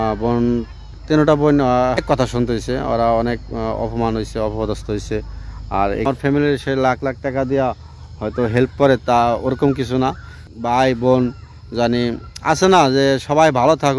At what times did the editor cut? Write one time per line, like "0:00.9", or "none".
0:02.0
0:06.1
0:10.5